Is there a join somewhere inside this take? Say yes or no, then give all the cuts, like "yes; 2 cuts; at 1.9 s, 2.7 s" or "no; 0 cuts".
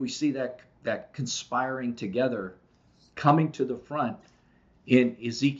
no; 0 cuts